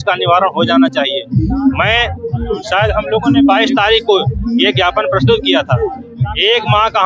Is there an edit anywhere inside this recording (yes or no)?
no